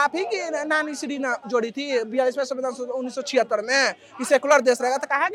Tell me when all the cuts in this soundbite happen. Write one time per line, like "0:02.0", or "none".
none